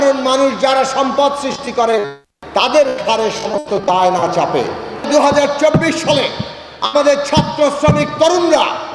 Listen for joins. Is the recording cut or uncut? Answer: cut